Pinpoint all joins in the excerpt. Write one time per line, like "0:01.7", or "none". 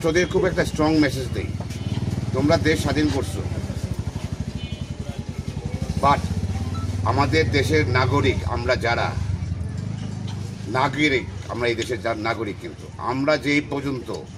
none